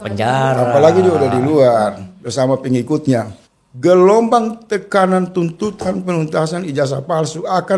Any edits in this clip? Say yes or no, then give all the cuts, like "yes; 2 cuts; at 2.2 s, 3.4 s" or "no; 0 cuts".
yes; 1 cut; at 3.4 s